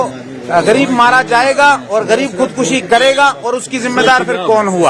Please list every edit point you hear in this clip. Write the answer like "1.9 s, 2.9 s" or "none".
none